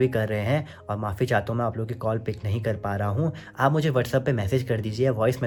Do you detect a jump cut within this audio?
no; 0 cuts

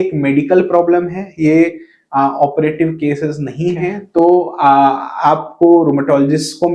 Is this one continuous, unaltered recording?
no; 1 cut; at 4.0 s

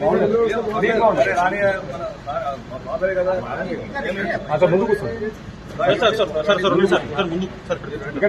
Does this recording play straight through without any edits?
yes; 0 cuts

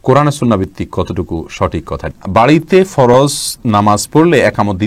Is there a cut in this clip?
yes; 1 cut; at 2.1 s

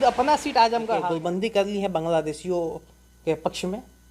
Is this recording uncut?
no; 1 cut; at 1.1 s

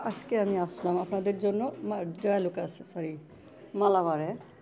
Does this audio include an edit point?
no; 0 cuts

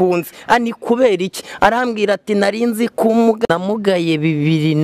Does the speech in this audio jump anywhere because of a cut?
yes; 1 cut; at 3.5 s

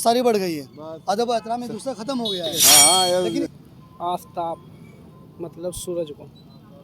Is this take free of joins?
no; 1 cut; at 3.6 s

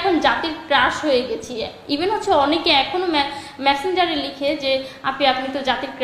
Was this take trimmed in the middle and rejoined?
no; 0 cuts

